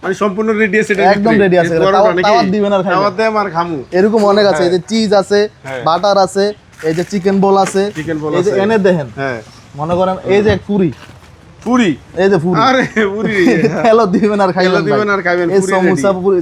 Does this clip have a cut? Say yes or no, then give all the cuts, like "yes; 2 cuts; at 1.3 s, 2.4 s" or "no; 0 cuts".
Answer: no; 0 cuts